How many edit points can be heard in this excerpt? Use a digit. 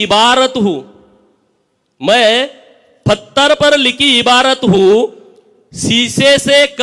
0